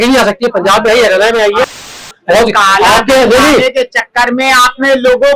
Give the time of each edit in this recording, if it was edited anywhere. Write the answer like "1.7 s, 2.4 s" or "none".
1.9 s